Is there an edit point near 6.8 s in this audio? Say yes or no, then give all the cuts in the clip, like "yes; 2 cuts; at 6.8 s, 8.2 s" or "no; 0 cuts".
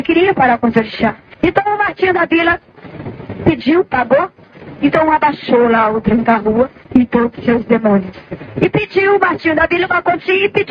yes; 2 cuts; at 1.2 s, 6.8 s